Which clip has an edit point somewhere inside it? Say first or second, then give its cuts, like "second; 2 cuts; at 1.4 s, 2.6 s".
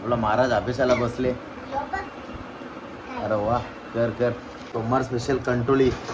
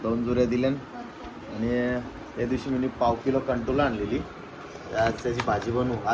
first; 1 cut; at 4.6 s